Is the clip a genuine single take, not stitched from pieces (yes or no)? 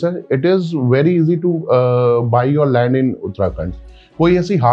yes